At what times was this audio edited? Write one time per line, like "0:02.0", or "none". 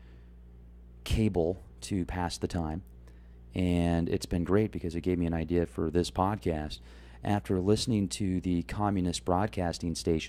none